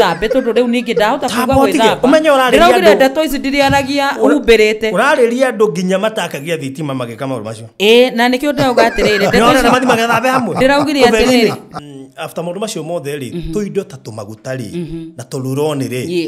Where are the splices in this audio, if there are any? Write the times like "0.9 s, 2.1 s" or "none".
11.7 s